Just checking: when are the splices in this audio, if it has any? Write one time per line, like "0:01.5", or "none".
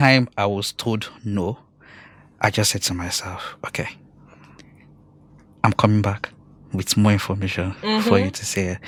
none